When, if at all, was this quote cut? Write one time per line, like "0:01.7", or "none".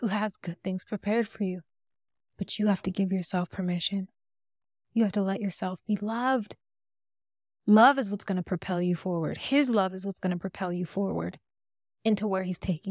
none